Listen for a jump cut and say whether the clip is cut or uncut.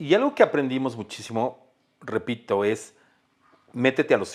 uncut